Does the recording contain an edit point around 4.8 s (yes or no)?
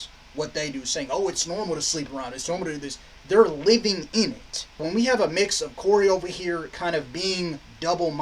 yes